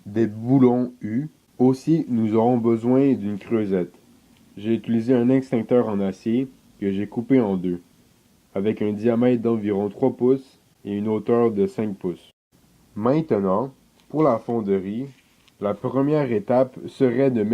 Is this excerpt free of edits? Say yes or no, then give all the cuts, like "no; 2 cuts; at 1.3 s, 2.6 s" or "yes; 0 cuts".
no; 1 cut; at 5.9 s